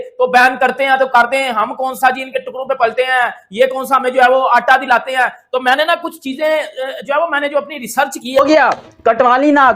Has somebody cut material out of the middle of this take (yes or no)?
yes